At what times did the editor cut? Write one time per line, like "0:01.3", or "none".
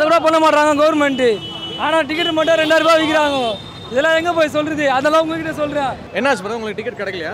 none